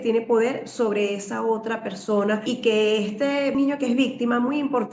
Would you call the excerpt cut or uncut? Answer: cut